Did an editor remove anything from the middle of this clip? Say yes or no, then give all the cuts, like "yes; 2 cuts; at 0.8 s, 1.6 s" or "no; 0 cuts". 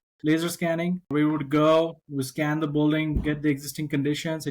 yes; 1 cut; at 1.1 s